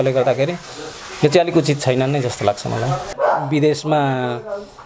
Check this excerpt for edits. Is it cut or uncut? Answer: cut